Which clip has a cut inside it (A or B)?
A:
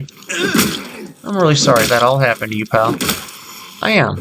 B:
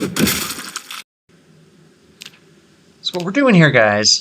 B